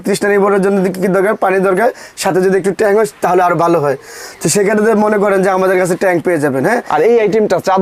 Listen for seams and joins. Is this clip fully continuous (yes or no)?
yes